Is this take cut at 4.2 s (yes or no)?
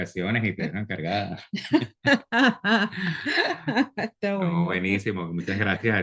no